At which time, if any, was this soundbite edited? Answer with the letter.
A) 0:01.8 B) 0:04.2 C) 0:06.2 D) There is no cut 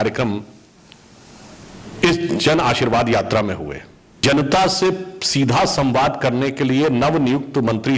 B